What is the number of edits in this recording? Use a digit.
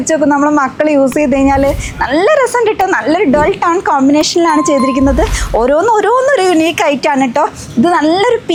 0